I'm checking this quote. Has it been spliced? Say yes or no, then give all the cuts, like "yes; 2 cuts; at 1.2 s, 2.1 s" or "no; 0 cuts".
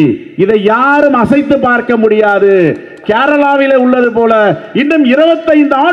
no; 0 cuts